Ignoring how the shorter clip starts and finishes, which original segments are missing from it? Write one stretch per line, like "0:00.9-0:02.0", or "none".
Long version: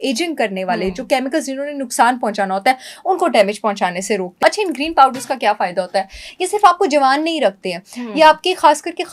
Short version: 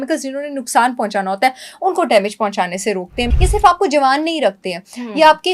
0:04.3-0:06.1